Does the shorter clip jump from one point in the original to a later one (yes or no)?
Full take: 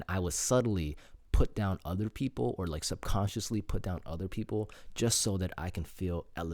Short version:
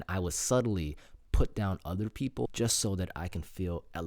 yes